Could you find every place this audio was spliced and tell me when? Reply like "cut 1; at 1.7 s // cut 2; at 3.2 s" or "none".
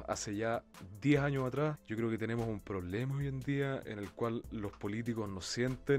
cut 1; at 1.8 s